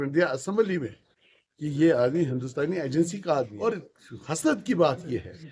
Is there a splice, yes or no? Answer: yes